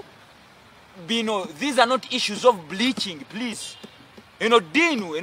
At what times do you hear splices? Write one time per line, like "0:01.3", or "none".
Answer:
none